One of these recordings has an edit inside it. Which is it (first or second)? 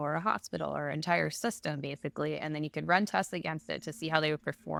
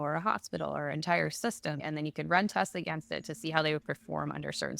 second